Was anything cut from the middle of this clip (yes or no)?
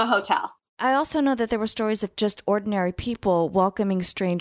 yes